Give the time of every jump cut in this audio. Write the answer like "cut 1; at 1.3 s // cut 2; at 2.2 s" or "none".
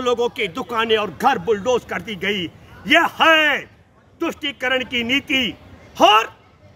none